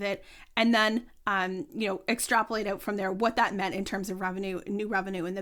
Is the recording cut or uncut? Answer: uncut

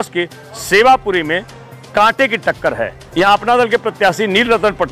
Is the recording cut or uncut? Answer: cut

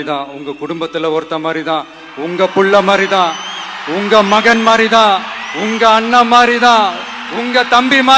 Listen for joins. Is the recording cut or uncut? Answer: uncut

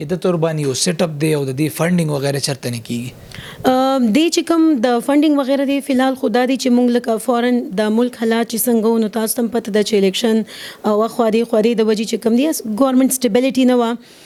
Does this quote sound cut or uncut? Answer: uncut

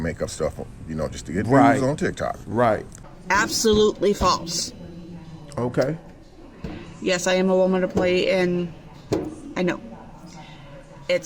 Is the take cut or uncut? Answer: cut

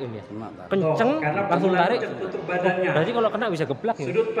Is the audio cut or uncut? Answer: uncut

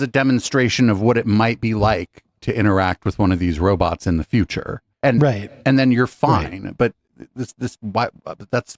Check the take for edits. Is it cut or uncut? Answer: uncut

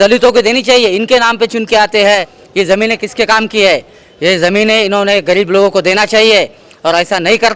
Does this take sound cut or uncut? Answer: cut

